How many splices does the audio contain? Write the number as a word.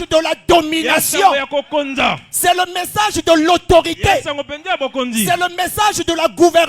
one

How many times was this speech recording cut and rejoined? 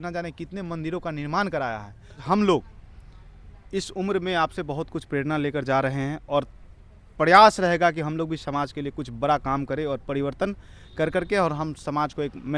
one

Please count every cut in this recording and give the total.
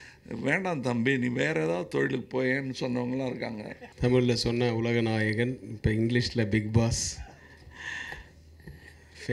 one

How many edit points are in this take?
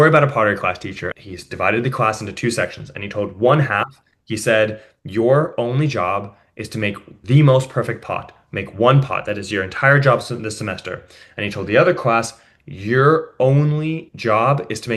two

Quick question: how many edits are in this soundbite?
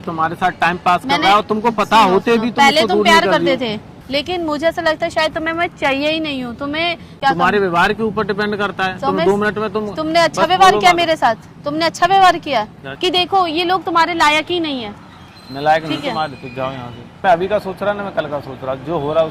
four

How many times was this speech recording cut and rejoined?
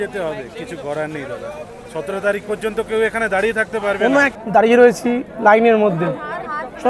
one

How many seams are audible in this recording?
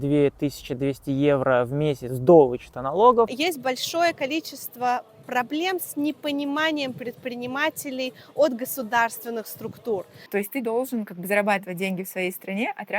two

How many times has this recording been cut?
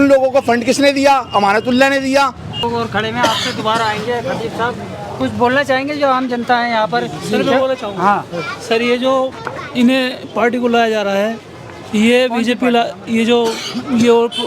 one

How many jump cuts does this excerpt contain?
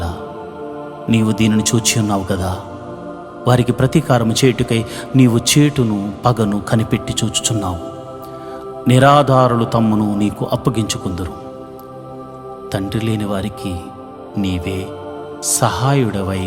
zero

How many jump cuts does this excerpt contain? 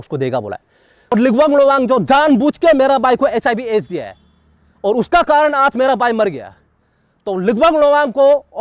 one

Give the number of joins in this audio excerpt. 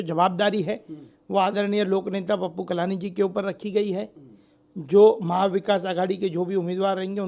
zero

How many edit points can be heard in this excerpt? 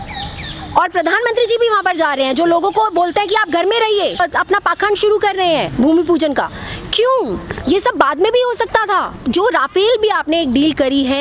two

